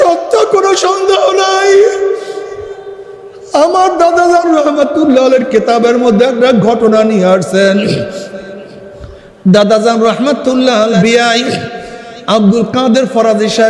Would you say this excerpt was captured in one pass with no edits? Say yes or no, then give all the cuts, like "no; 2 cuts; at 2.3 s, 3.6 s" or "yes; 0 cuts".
no; 1 cut; at 10.9 s